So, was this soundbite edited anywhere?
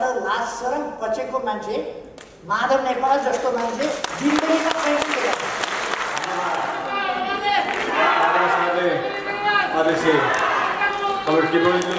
no; 0 cuts

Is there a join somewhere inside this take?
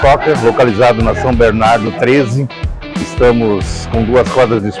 no; 0 cuts

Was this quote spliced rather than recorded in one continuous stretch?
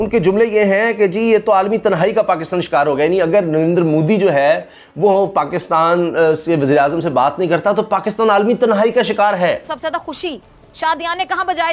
yes; 1 cut; at 9.7 s

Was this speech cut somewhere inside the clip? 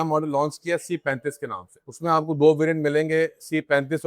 no; 0 cuts

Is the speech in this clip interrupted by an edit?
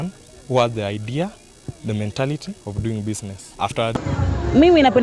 yes; 1 cut; at 4.0 s

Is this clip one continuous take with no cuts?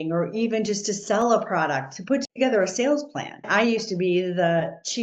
yes; 0 cuts

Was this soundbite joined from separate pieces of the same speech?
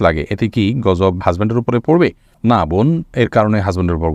no; 0 cuts

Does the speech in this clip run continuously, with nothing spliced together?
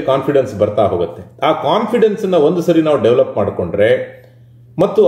yes; 0 cuts

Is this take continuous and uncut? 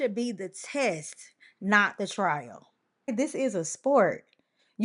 no; 1 cut; at 3.1 s

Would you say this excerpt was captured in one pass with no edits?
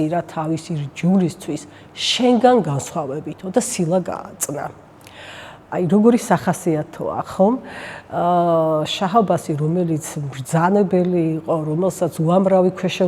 yes; 0 cuts

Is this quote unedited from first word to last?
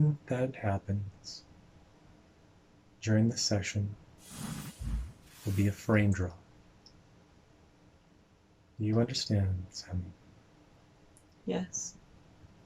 yes; 0 cuts

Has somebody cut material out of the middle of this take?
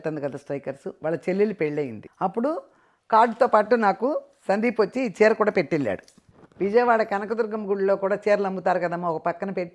yes; 2 cuts; at 2.0 s, 6.1 s

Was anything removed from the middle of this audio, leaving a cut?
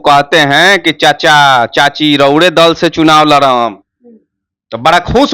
no; 0 cuts

